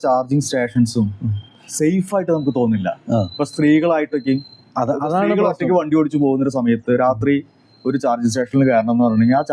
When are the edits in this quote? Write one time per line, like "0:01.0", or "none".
none